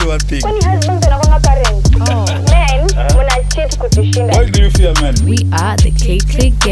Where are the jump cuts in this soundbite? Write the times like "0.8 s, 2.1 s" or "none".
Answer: none

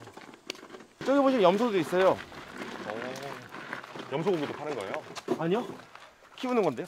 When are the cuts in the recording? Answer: 1.0 s

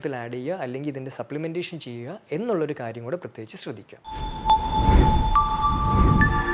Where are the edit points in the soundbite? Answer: 3.9 s

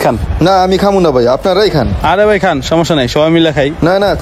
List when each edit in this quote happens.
none

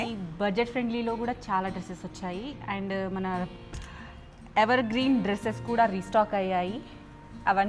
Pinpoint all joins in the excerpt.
none

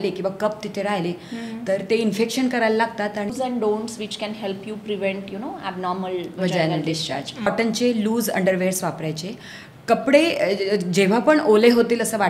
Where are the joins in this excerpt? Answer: 3.3 s, 7.5 s

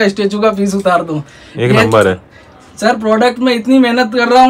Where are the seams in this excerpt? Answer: none

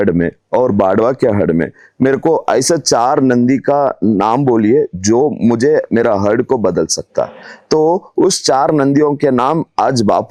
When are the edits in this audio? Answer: none

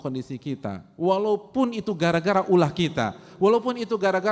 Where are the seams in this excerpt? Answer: none

